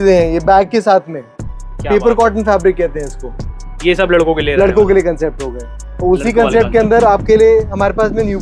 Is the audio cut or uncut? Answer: uncut